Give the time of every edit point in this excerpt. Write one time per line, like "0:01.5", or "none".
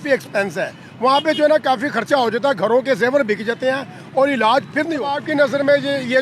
0:05.2